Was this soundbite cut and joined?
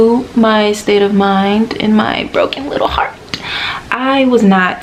no; 0 cuts

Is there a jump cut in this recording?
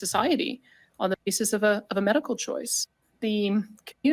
yes; 1 cut; at 3.2 s

